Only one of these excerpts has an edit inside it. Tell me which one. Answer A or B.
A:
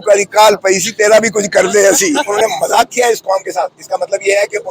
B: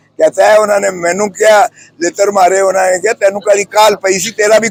A